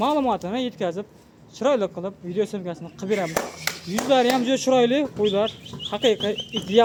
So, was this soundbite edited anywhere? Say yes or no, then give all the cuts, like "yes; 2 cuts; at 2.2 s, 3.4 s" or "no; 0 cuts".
no; 0 cuts